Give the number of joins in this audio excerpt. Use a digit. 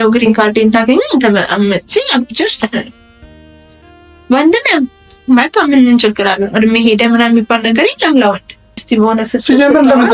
1